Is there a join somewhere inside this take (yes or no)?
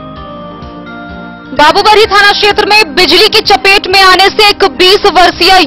yes